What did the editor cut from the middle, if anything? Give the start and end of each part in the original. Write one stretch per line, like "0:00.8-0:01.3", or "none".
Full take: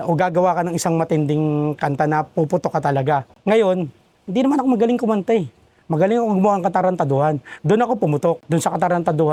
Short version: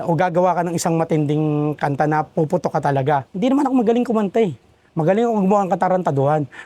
0:03.3-0:04.2